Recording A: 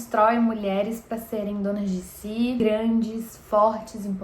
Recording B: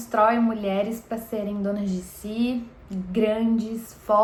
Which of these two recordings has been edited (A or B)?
A